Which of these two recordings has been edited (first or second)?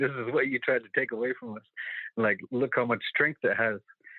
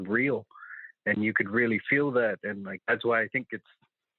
second